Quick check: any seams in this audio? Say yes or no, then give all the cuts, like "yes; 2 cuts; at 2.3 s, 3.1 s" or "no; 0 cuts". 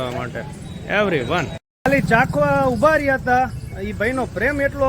yes; 1 cut; at 1.7 s